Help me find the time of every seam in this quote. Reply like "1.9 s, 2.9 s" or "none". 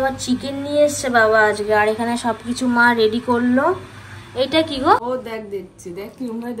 5.0 s

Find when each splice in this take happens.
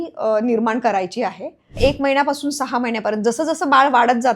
1.7 s

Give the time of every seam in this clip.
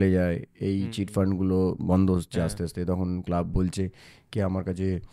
none

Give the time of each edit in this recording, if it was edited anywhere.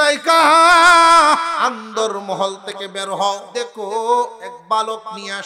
1.5 s, 3.5 s, 4.5 s

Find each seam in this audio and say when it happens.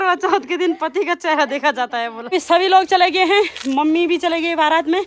2.3 s

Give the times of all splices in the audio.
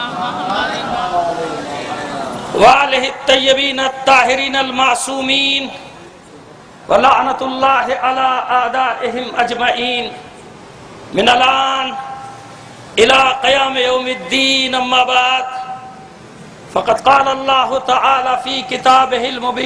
2.6 s

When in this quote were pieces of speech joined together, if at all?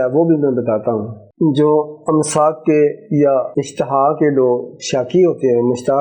1.2 s, 3.6 s

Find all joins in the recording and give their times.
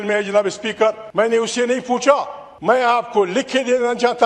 1.0 s, 2.7 s

